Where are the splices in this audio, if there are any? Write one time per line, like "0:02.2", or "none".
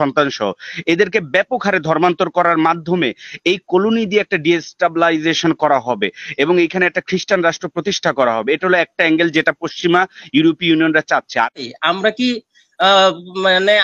0:11.6